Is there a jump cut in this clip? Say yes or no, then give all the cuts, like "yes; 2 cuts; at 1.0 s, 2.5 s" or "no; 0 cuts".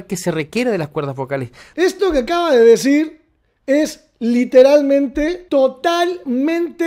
yes; 2 cuts; at 1.6 s, 5.4 s